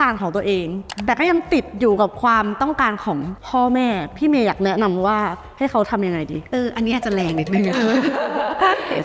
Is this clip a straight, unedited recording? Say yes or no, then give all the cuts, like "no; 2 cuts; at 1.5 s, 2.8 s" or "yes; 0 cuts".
yes; 0 cuts